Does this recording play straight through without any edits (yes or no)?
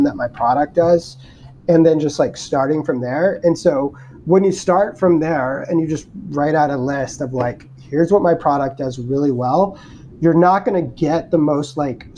yes